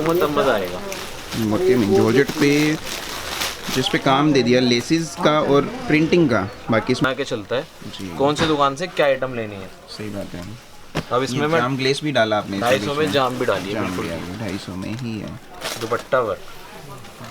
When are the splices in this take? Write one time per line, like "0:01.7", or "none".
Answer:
0:07.0